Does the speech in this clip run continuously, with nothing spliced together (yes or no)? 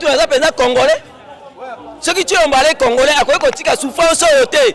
yes